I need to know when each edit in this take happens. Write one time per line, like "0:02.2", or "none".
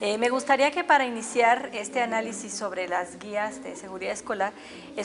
0:03.0